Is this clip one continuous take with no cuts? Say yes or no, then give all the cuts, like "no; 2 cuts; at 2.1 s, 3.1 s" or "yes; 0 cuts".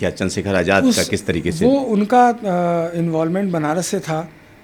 yes; 0 cuts